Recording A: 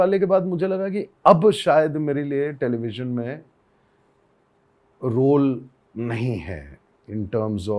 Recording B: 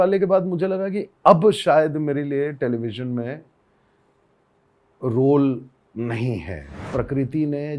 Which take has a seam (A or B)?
B